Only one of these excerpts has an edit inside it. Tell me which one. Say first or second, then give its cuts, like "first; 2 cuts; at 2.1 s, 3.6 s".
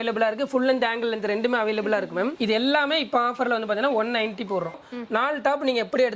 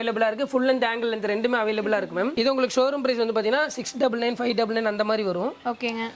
first; 2 cuts; at 2.3 s, 4.7 s